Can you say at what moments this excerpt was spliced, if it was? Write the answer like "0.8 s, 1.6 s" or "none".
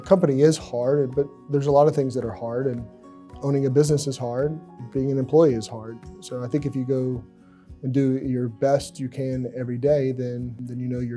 none